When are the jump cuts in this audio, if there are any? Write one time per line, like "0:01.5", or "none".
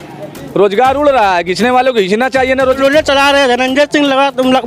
0:02.6